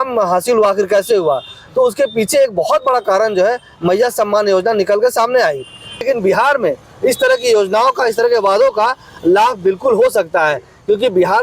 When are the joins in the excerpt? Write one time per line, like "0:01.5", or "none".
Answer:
0:06.1